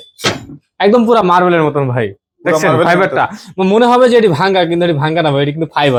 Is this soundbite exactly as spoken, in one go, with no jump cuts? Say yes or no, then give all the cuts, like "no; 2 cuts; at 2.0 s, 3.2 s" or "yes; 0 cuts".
yes; 0 cuts